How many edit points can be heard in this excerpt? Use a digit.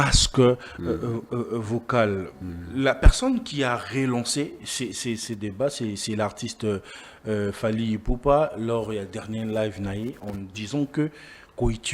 0